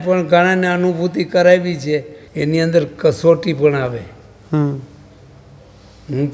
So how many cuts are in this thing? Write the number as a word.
one